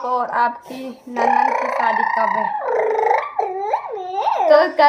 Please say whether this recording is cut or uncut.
uncut